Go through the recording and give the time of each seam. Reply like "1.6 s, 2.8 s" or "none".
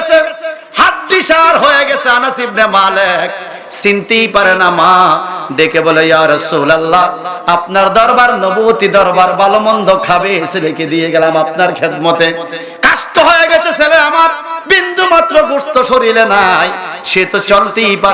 none